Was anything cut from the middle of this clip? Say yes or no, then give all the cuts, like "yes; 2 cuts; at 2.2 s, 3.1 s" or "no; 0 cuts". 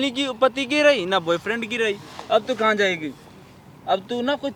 no; 0 cuts